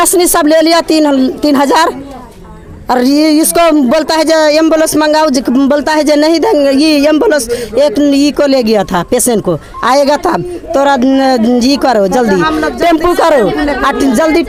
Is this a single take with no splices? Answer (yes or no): yes